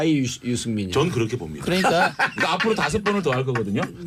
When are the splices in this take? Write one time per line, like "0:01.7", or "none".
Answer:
none

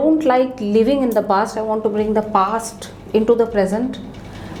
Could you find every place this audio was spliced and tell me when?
none

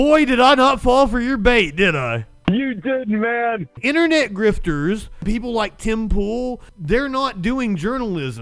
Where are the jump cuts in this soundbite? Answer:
0:03.8
0:05.2
0:06.7

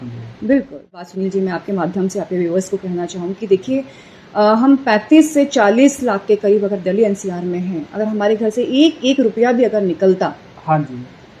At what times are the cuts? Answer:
0:01.1

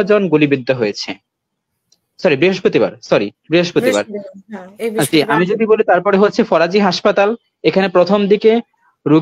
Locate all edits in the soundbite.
none

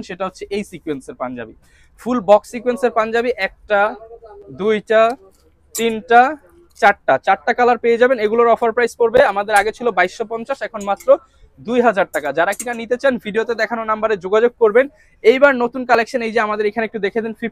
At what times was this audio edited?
none

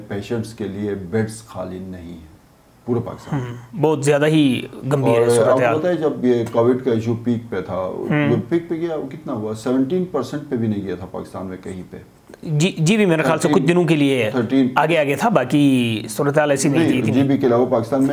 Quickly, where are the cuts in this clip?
none

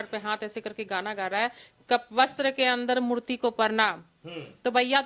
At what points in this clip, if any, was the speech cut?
none

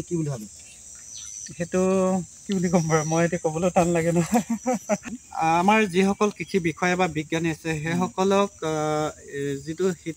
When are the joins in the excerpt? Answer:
0:05.2

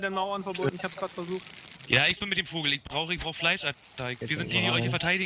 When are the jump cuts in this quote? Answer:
none

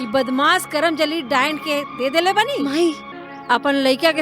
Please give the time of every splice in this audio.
0:03.1

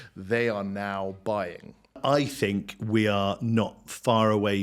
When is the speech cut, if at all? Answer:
0:02.0

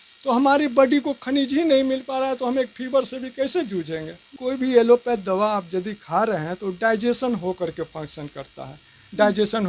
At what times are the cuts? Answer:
0:04.3

